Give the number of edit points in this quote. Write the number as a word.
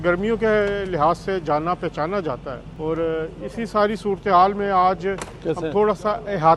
zero